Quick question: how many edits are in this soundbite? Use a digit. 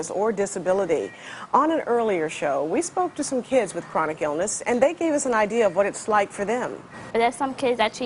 1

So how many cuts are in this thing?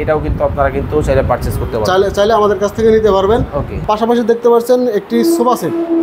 1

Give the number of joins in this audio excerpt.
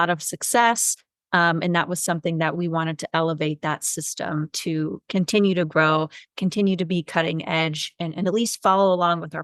0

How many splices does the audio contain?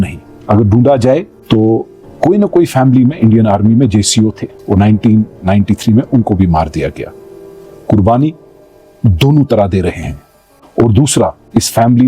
1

